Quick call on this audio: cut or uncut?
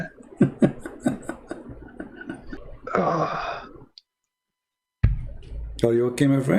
cut